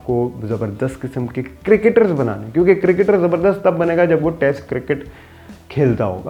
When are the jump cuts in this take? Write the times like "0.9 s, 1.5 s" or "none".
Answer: none